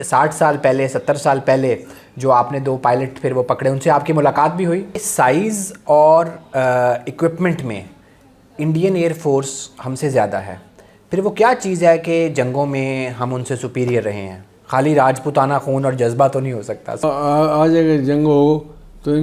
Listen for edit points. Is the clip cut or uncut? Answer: cut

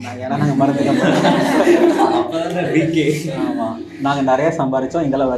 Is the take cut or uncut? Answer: uncut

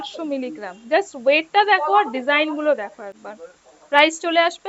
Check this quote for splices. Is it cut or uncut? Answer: uncut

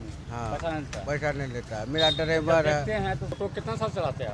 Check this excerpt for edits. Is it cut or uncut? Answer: cut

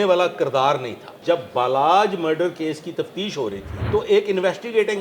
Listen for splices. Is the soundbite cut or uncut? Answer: cut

